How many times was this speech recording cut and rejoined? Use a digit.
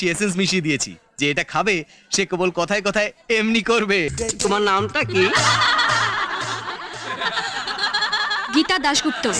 1